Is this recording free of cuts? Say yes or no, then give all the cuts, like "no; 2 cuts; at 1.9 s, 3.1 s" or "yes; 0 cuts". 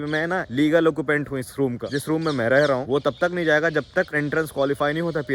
yes; 0 cuts